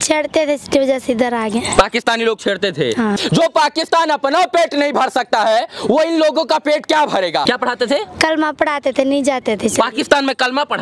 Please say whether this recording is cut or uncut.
cut